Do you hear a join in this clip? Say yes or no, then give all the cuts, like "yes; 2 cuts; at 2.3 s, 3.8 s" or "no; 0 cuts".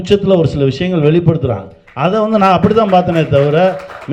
no; 0 cuts